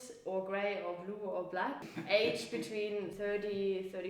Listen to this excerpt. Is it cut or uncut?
cut